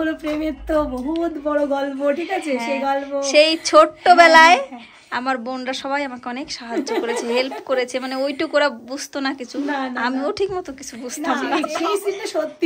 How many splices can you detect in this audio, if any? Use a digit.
1